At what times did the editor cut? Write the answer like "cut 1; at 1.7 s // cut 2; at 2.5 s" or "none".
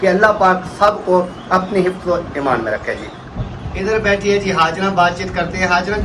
cut 1; at 3.2 s